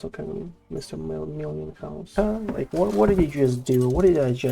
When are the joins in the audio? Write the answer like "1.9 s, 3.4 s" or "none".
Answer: 2.1 s

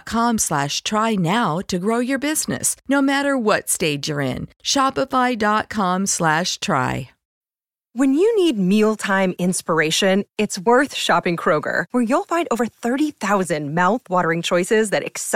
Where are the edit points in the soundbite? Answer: 7.3 s

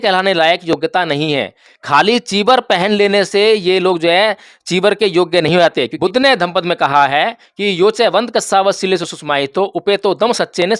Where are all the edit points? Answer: 5.9 s

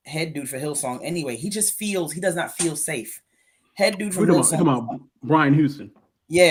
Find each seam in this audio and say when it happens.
none

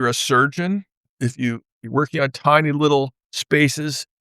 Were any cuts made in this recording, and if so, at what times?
1.2 s

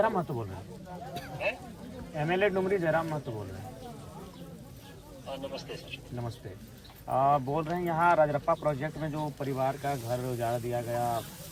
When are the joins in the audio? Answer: none

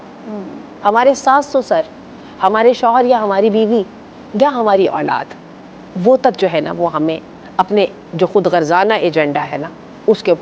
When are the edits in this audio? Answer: none

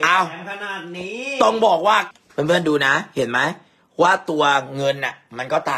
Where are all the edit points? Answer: 2.1 s

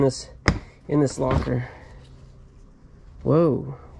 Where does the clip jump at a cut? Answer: none

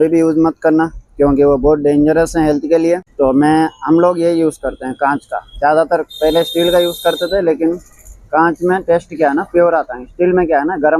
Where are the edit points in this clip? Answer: none

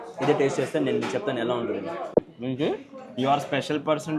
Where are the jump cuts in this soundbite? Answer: 2.1 s

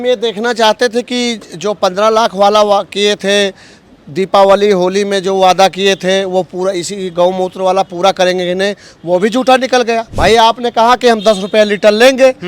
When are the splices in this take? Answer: 10.1 s

